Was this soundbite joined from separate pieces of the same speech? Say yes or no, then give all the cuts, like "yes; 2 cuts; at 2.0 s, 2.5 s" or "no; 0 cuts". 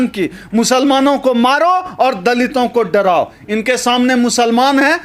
no; 0 cuts